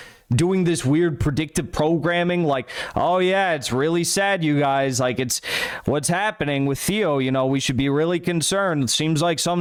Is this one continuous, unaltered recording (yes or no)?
yes